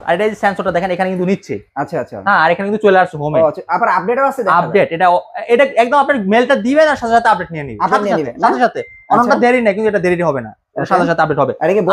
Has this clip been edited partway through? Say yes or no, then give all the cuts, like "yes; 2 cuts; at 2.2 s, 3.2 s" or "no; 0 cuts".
no; 0 cuts